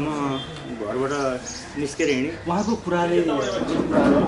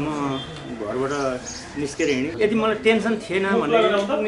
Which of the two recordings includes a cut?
second; 1 cut; at 2.3 s

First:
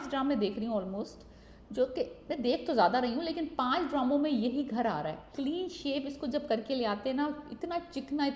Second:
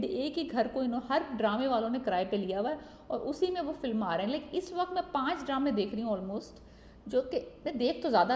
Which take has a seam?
first; 1 cut; at 5.3 s

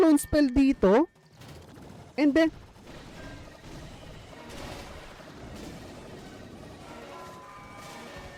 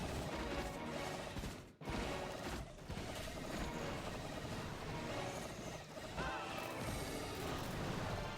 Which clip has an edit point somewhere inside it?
second; 1 cut; at 6.2 s

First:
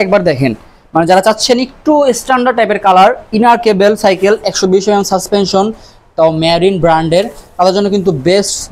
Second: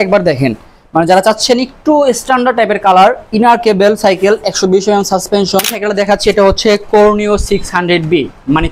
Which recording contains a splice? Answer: second; 1 cut; at 5.8 s

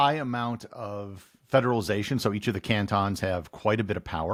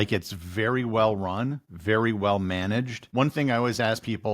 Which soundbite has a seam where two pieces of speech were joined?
second; 2 cuts; at 1.7 s, 3.0 s

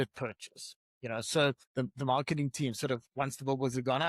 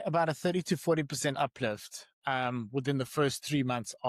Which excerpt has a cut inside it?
first; 1 cut; at 1.6 s

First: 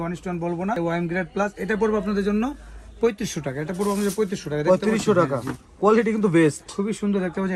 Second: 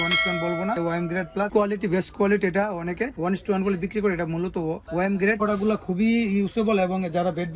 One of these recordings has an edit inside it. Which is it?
second; 2 cuts; at 1.5 s, 5.4 s

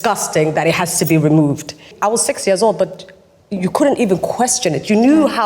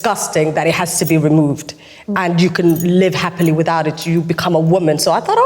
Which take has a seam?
first; 1 cut; at 1.9 s

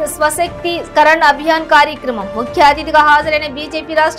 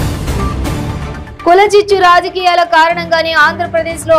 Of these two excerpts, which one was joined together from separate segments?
second; 1 cut; at 1.0 s

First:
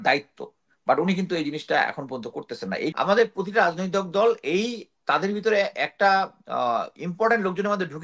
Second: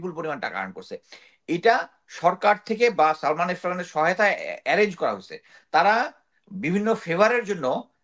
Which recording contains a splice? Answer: first; 1 cut; at 2.9 s

